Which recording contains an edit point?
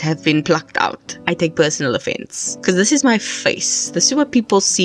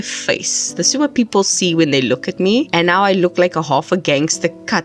first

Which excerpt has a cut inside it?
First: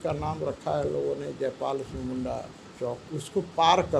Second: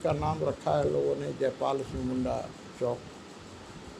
first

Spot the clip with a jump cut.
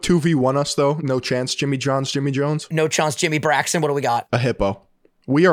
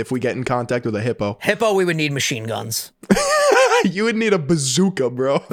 first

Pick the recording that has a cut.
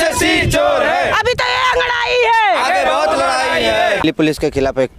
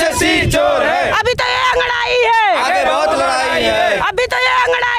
first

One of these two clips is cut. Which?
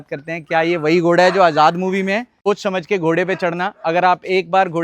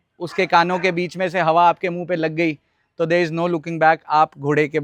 first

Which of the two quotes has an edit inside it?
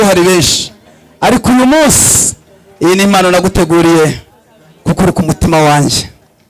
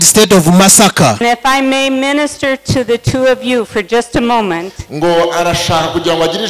second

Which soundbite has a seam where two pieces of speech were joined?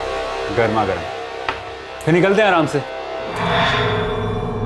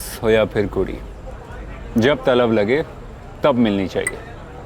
first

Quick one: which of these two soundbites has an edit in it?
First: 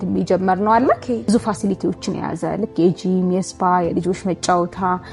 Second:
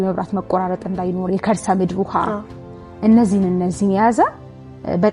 first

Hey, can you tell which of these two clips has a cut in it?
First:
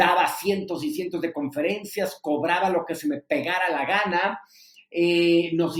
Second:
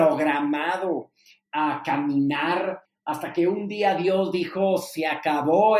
second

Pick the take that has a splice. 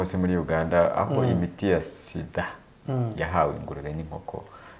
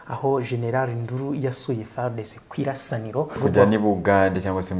second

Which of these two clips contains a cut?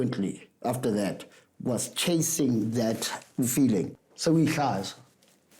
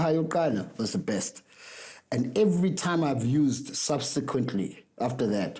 first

